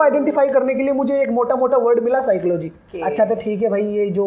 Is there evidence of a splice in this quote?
yes; 1 cut; at 2.8 s

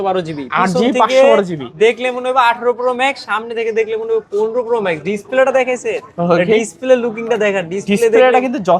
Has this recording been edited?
no; 0 cuts

